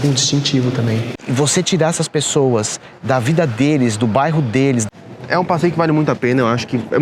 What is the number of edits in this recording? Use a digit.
2